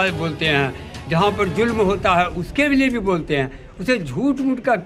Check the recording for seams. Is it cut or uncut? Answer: uncut